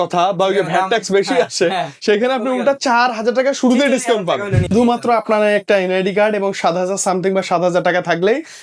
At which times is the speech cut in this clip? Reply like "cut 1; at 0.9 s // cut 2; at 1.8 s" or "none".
cut 1; at 4.7 s